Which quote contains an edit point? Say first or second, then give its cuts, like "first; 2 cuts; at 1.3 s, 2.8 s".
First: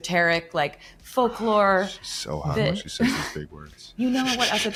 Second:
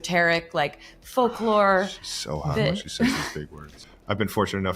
second; 1 cut; at 3.8 s